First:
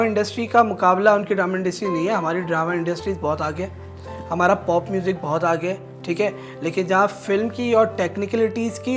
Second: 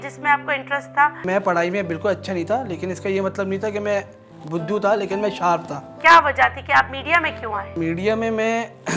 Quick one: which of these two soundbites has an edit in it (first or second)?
second